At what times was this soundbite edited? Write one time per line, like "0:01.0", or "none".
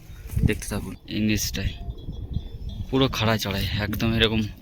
0:01.0